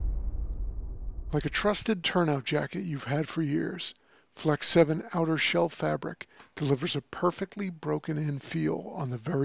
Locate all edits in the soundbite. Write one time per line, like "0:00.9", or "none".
0:01.2